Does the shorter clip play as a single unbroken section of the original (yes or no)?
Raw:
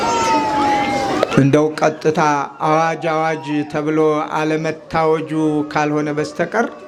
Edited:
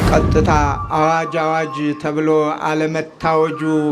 yes